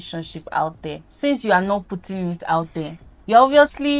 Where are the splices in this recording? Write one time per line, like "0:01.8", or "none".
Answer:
none